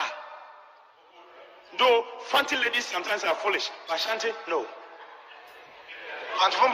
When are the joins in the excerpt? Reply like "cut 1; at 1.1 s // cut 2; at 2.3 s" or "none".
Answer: none